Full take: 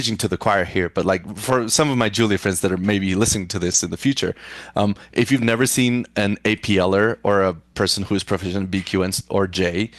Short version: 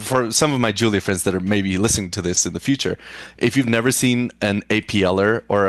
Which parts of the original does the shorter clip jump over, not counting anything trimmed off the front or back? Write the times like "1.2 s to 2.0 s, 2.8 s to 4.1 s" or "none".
4.7 s to 5.0 s